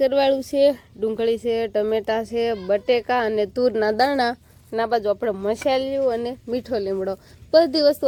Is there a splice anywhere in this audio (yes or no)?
no